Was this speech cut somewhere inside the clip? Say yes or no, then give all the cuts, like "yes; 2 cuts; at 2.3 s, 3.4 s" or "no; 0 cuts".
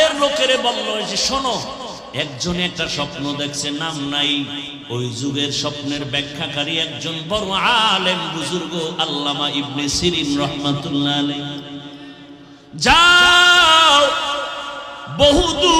yes; 2 cuts; at 2.0 s, 4.7 s